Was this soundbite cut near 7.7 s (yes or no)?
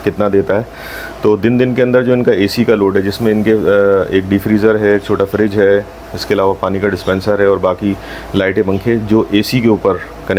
no